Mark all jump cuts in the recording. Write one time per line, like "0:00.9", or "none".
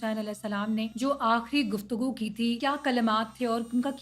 0:00.9
0:02.6